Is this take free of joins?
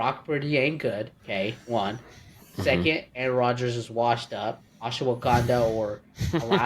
no; 1 cut; at 1.2 s

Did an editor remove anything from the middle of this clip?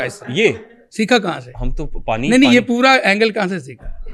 no; 0 cuts

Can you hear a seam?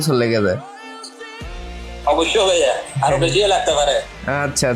no; 0 cuts

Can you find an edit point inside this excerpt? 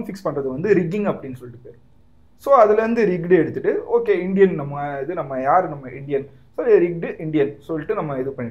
no; 0 cuts

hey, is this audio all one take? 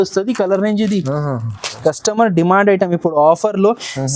no; 1 cut; at 1.7 s

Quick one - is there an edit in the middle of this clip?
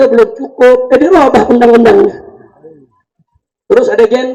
no; 0 cuts

